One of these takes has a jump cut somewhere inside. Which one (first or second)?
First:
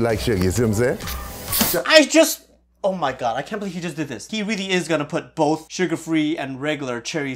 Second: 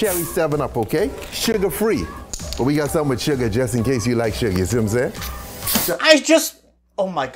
first